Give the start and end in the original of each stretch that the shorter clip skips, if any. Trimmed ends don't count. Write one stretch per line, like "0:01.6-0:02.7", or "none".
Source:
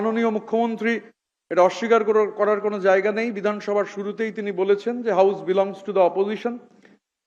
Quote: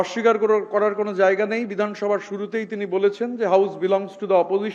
none